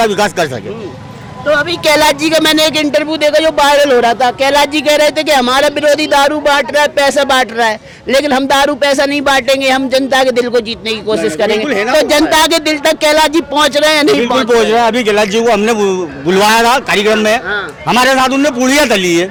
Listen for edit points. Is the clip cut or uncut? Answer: uncut